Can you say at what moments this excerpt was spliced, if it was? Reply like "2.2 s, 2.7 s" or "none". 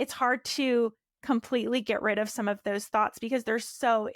none

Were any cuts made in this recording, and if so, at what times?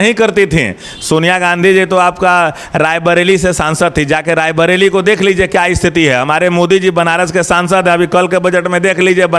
none

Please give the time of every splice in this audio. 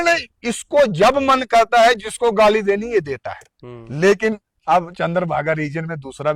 none

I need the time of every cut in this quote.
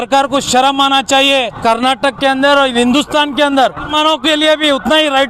1.5 s, 3.9 s

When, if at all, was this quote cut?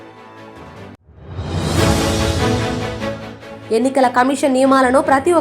1.0 s, 3.0 s

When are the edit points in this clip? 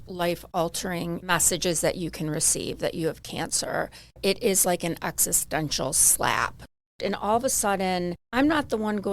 1.2 s, 4.2 s, 6.8 s, 8.2 s

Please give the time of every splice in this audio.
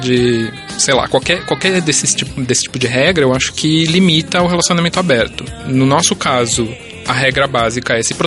5.6 s

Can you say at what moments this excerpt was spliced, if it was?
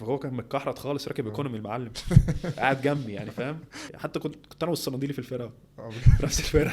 3.9 s

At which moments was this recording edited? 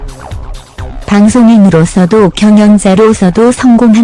1.0 s

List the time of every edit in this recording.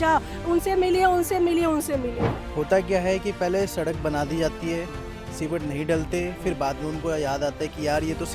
2.4 s

